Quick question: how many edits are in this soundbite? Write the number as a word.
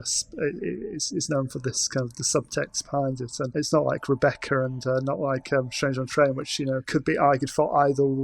two